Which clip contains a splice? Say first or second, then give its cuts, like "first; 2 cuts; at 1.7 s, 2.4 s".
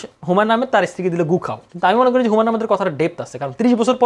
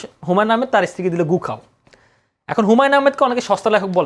first; 1 cut; at 1.6 s